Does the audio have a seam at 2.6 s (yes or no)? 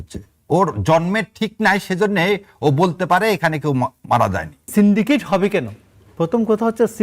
no